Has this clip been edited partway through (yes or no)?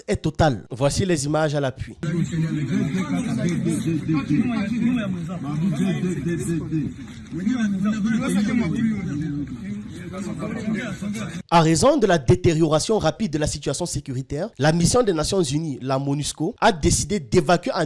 no